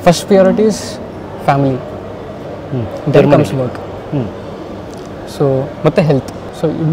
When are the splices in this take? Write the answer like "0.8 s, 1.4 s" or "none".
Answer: none